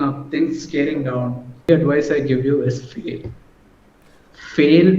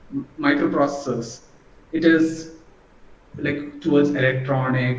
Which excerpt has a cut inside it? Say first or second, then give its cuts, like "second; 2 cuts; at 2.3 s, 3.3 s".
first; 1 cut; at 1.7 s